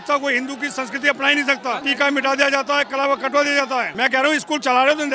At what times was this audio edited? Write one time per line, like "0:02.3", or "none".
0:01.8
0:03.9